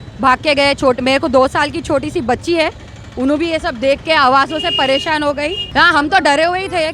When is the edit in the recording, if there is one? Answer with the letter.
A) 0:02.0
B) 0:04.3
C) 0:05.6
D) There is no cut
C